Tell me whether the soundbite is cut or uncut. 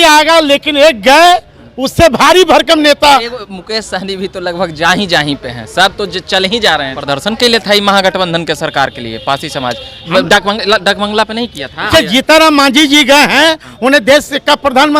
cut